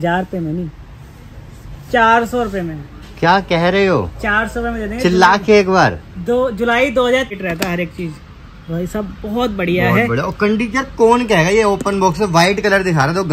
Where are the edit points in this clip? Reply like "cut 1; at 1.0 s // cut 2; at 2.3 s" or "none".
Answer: cut 1; at 7.3 s